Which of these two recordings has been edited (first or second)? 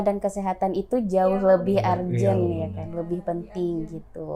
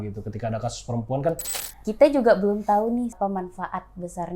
second